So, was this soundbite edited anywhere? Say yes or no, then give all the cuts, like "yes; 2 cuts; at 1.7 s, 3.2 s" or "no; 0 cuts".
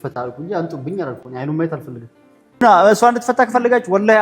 yes; 1 cut; at 2.6 s